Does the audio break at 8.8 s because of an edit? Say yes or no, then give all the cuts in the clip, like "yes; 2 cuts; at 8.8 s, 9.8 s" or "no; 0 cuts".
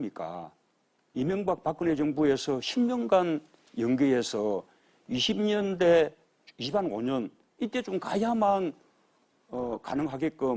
no; 1 cut; at 5.2 s